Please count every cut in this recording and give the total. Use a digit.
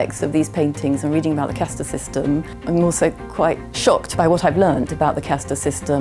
2